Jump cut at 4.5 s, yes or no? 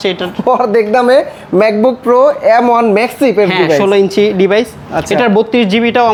no